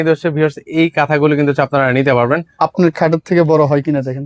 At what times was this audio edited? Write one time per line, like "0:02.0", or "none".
0:02.6

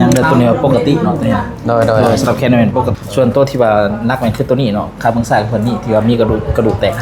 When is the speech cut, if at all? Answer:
0:02.9

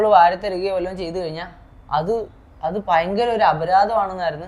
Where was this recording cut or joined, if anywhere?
none

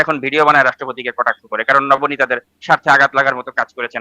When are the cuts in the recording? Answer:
none

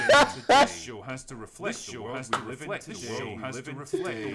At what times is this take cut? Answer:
none

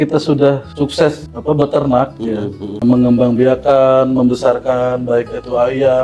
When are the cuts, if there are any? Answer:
none

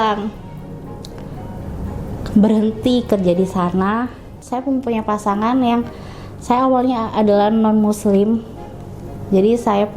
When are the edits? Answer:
0:04.4

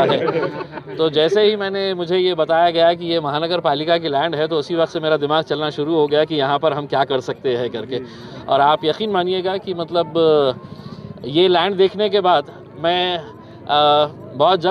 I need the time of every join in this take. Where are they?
none

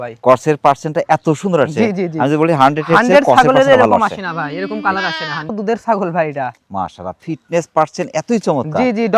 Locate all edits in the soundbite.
0:05.5

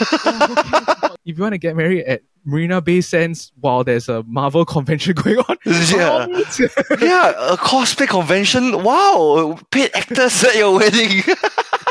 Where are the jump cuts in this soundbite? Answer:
0:01.2

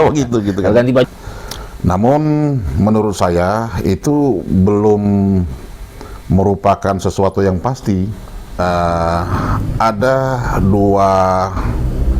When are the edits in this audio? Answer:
0:01.1
0:08.6

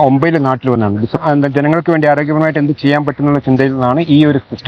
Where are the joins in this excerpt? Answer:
0:01.1

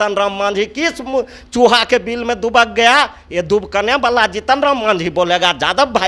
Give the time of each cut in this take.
none

